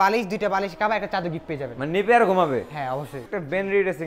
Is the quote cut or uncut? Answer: cut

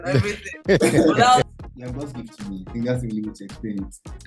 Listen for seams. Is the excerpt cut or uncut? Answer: cut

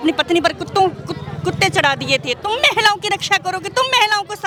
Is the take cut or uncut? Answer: uncut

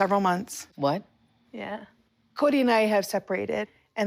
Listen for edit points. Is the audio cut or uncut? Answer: uncut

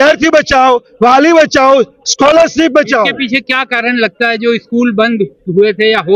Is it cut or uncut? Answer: uncut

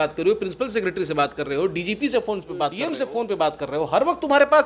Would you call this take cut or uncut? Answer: cut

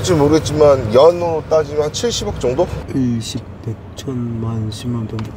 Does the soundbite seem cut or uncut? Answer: cut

